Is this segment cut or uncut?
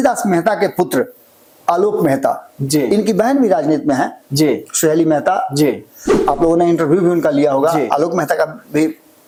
uncut